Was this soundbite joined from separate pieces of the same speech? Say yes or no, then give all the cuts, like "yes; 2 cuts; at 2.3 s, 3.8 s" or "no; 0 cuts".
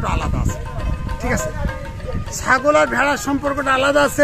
no; 0 cuts